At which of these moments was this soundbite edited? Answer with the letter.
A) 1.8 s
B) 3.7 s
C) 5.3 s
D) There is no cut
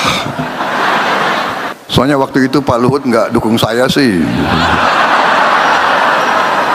A